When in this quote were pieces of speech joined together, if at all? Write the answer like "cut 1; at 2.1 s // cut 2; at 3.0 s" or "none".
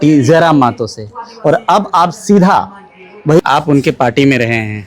cut 1; at 3.4 s